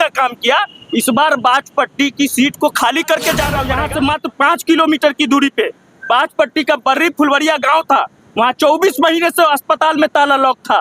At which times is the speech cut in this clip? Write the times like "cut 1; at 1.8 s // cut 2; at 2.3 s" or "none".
cut 1; at 3.7 s